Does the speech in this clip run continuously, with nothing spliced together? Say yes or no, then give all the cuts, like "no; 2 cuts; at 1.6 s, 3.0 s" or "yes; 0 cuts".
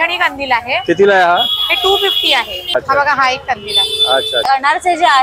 no; 2 cuts; at 2.7 s, 4.4 s